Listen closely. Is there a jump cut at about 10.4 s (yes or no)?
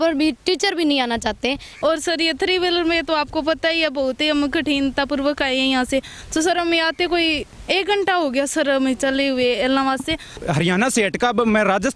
yes